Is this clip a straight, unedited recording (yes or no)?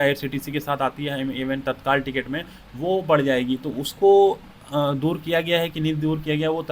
yes